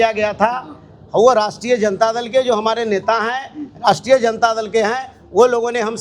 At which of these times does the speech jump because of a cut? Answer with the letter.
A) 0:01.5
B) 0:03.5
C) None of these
C